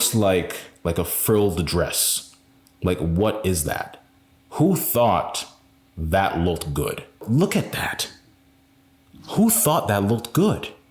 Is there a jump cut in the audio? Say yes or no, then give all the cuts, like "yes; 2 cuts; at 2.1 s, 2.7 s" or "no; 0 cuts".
yes; 1 cut; at 7.2 s